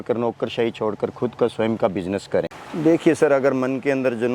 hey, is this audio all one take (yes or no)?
no